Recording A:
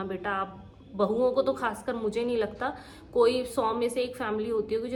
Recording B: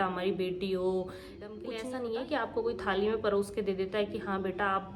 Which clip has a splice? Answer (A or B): B